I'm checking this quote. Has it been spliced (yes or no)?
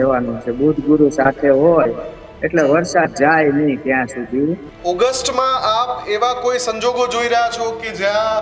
yes